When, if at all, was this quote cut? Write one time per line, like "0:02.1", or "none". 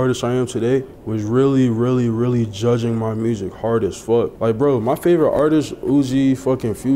0:01.0
0:04.4